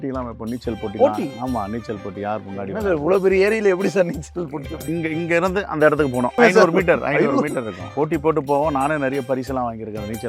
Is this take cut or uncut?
cut